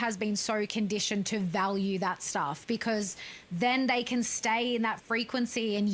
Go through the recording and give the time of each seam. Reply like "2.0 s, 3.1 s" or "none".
none